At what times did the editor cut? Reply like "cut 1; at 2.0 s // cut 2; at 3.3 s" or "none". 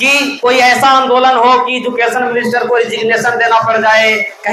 none